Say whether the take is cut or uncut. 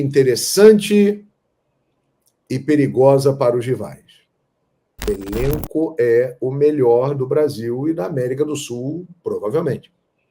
cut